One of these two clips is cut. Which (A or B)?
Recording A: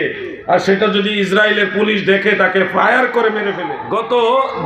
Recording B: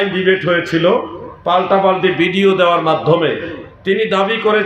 A